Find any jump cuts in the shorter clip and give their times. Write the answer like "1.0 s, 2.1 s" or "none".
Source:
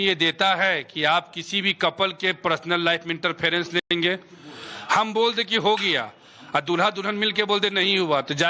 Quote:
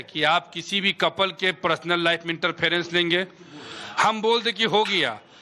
3.0 s